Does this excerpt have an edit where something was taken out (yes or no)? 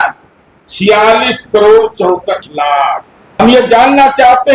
yes